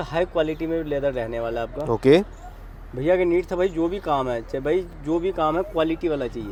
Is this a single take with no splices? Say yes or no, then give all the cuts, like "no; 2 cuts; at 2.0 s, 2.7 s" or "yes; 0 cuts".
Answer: yes; 0 cuts